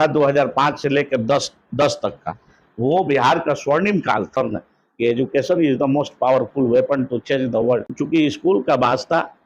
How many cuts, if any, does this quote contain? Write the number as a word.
two